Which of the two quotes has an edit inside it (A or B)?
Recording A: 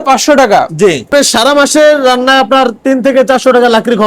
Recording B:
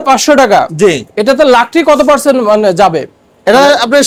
A